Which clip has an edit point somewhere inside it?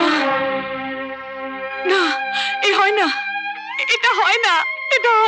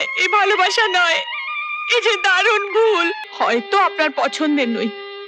second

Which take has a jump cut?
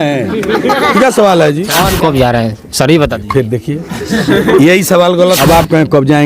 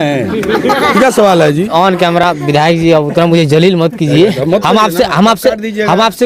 first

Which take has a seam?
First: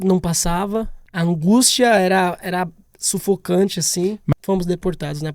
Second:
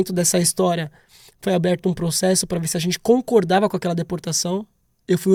first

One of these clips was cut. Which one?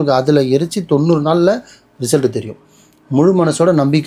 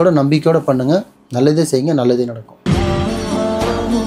second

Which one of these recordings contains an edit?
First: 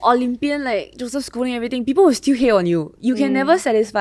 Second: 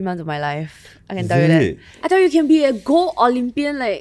second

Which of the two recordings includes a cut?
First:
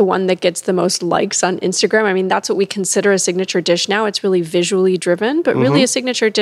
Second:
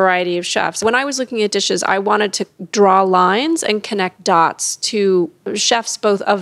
second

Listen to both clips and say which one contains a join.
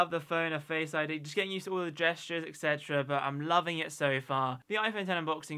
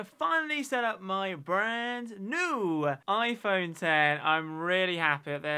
first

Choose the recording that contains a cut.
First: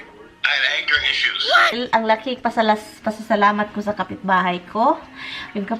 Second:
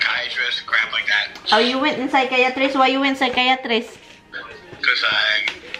first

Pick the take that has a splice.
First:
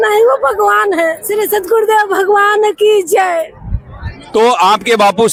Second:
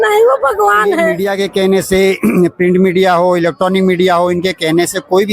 second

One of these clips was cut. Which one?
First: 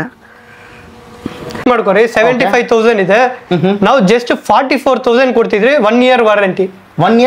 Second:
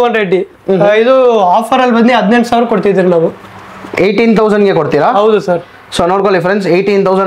first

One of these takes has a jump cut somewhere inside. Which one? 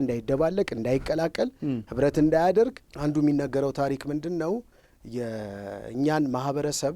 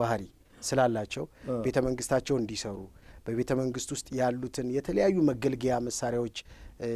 first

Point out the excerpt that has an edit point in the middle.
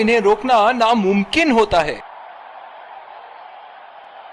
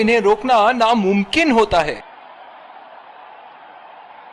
second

